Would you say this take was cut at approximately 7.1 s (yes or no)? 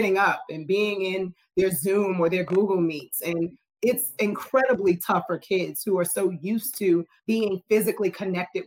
yes